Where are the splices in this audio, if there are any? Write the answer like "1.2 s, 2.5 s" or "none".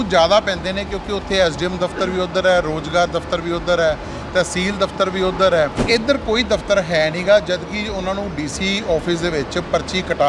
5.8 s